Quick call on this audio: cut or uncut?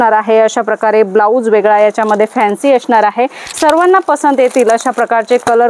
cut